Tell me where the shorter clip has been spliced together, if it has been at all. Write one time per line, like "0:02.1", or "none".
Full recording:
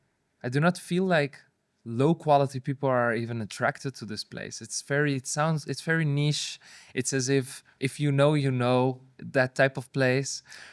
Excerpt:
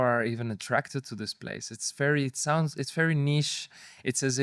none